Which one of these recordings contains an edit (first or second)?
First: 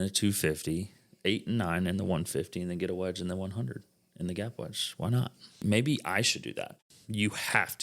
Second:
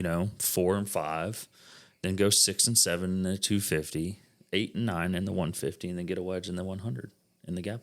first